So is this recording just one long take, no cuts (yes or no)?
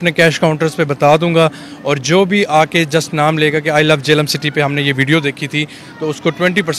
yes